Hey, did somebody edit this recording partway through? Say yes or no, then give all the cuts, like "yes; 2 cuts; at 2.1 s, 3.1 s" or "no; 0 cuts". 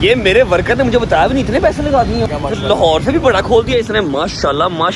yes; 1 cut; at 2.3 s